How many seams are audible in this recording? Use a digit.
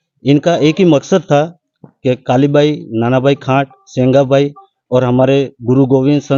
0